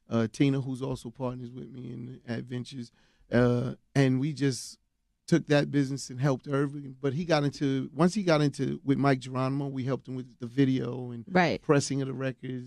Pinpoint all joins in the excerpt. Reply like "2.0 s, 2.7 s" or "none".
9.2 s